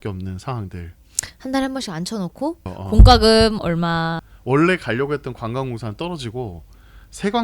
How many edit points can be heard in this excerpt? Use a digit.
2